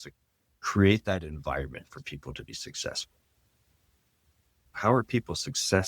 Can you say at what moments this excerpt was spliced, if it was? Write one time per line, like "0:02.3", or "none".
0:04.7